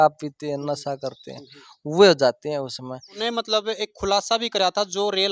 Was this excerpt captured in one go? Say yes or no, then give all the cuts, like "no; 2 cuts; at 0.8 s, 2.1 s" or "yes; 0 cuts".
no; 1 cut; at 3.2 s